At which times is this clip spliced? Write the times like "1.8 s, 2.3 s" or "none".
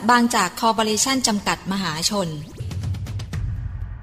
2.6 s

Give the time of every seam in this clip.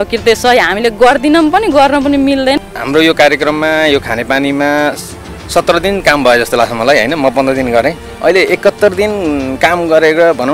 2.6 s, 8.1 s

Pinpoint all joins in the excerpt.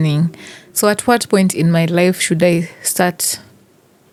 none

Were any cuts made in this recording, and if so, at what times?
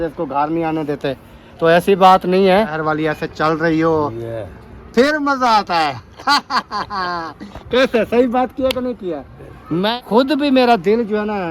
2.8 s, 9.8 s

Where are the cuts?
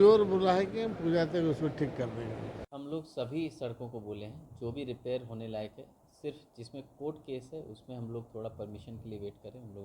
2.7 s

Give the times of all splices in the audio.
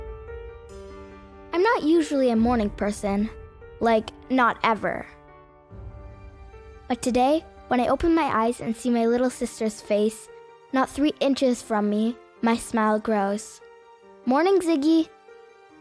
1.1 s

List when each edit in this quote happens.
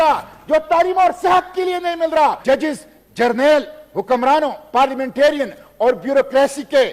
2.4 s

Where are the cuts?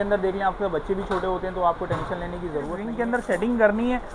2.8 s

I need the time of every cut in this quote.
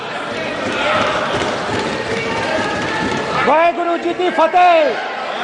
none

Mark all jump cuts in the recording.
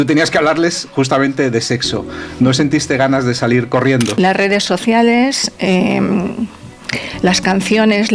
4.1 s

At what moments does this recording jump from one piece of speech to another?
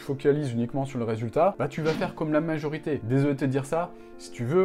3.0 s

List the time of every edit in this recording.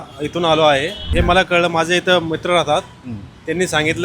1.1 s

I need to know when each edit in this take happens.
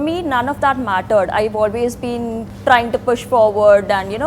2.5 s

